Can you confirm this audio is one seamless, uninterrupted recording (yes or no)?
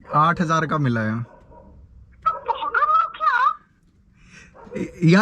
yes